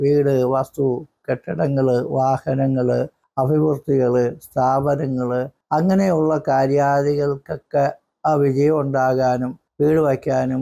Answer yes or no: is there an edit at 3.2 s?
yes